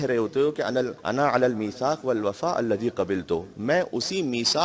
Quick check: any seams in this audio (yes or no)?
yes